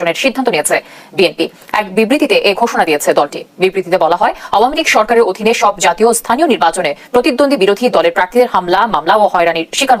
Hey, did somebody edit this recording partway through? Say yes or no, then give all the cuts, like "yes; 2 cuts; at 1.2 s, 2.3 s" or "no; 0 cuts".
no; 0 cuts